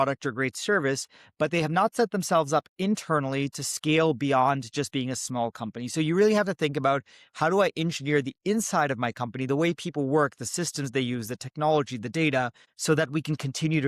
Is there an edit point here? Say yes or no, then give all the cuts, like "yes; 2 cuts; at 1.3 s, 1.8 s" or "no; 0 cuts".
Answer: yes; 1 cut; at 12.6 s